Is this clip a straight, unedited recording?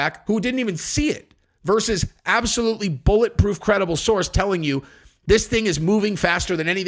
yes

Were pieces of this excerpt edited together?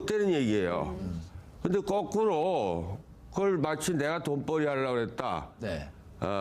yes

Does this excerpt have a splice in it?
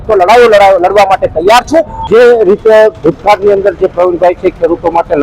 yes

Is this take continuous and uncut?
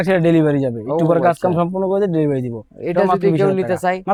yes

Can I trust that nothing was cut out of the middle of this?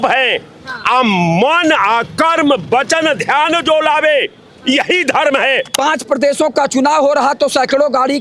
no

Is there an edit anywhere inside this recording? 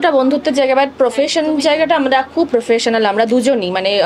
no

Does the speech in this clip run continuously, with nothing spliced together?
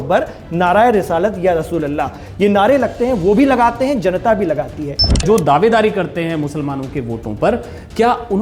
no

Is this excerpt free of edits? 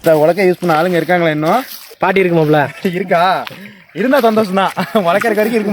no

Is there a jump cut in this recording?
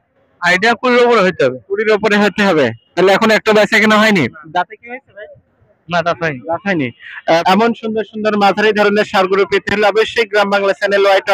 no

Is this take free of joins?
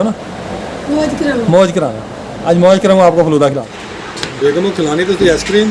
no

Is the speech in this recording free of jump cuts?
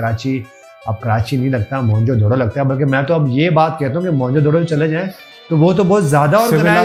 yes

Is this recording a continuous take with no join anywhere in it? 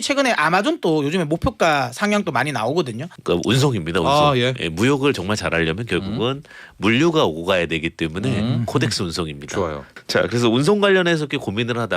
no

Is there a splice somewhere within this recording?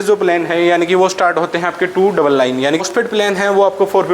yes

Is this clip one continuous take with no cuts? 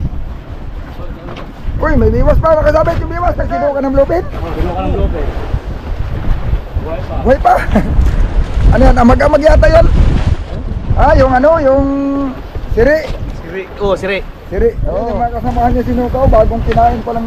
no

